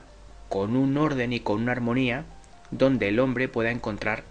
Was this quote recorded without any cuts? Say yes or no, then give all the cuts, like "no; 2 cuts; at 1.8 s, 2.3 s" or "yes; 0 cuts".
yes; 0 cuts